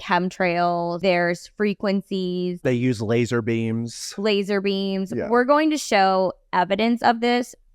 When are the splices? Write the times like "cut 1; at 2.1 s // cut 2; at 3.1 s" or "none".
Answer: none